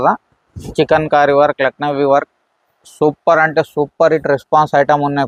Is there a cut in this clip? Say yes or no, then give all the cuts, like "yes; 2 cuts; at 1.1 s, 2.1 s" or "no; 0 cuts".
no; 0 cuts